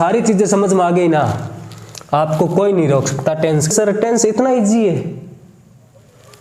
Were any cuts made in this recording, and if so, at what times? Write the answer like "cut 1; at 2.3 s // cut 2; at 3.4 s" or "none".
cut 1; at 3.6 s